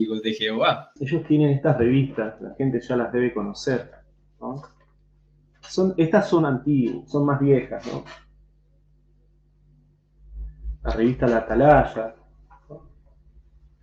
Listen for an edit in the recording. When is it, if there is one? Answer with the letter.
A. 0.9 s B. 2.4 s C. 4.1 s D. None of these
A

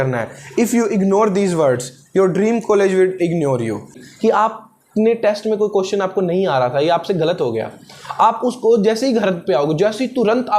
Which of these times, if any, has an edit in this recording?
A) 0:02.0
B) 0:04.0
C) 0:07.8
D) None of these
B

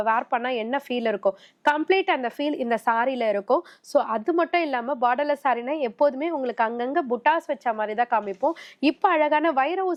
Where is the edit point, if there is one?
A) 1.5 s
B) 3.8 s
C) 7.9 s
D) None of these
D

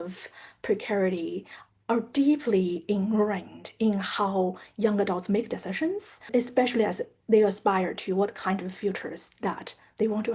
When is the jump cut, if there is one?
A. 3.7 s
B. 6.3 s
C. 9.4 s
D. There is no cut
B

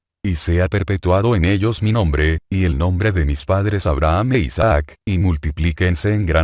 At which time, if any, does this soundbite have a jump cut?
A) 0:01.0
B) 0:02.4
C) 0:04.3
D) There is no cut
D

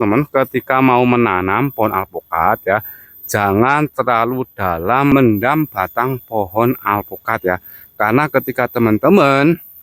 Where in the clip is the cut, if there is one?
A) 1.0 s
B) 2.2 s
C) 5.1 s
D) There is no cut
C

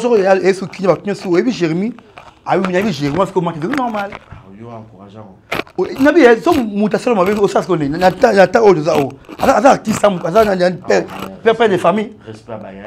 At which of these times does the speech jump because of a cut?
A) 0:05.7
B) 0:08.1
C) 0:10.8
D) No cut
D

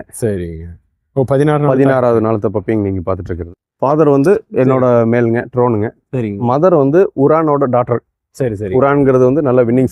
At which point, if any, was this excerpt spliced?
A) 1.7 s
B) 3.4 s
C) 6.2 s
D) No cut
B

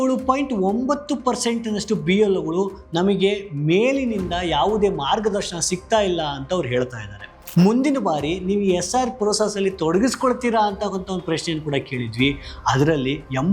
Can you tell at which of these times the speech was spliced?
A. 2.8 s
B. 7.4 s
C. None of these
B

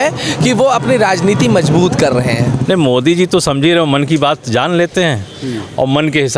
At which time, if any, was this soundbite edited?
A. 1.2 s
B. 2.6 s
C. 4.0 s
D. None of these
B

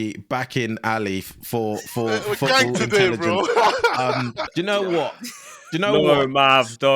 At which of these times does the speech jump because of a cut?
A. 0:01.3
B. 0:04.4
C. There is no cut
B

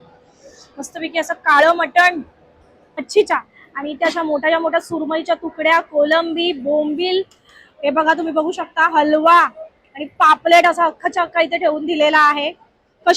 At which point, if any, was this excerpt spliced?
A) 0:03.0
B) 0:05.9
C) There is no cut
A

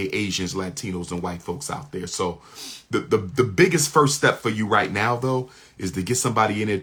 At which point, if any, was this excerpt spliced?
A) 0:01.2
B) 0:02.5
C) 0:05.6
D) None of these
D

